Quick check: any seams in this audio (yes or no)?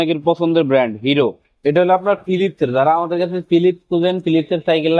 yes